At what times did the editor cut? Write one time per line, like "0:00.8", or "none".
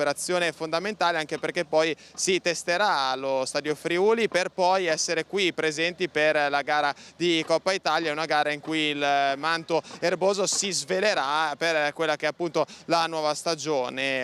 none